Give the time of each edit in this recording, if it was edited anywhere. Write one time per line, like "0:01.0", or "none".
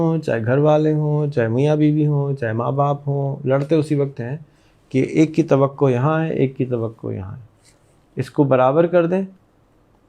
none